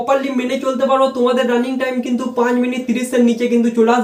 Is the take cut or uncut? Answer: uncut